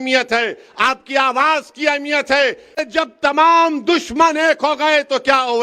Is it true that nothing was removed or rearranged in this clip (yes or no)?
no